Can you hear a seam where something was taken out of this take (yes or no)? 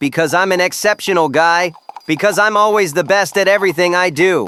no